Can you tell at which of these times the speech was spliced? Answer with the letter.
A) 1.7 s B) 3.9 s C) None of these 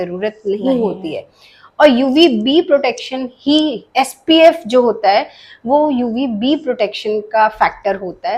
C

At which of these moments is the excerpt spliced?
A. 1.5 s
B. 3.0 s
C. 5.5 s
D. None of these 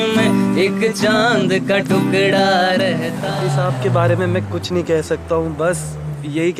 B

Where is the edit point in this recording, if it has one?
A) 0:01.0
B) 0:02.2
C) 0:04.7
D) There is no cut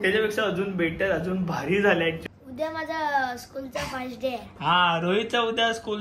B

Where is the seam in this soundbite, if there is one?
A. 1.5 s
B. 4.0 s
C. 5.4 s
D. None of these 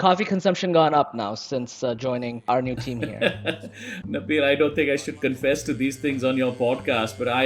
B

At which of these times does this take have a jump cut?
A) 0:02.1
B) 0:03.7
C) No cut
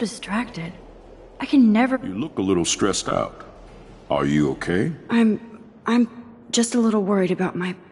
A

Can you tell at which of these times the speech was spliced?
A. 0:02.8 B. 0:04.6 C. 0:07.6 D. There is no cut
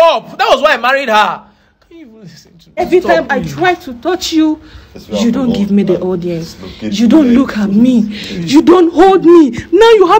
A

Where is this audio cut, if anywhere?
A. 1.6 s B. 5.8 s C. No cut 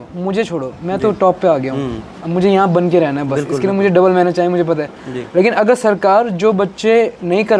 C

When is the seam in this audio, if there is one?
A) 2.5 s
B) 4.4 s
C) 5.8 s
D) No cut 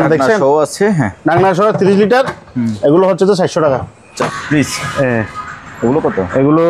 B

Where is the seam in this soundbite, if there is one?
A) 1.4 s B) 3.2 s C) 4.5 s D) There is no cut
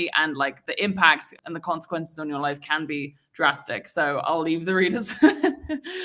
D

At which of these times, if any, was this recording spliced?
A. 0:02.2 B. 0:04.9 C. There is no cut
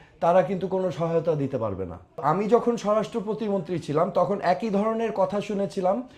A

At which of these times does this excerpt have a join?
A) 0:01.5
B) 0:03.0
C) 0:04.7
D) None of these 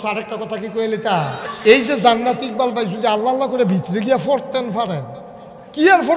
A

